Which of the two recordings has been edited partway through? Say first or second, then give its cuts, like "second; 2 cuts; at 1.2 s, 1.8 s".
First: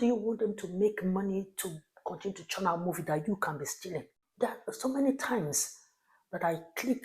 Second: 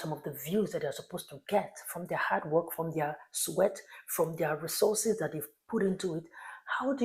first; 1 cut; at 4.2 s